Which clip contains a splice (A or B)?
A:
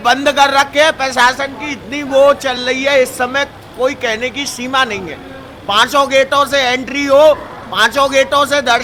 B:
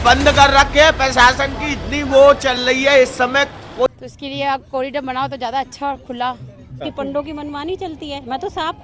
B